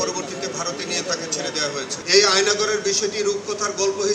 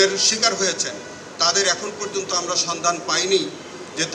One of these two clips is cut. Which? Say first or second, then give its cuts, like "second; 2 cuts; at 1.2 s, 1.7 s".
first; 1 cut; at 1.9 s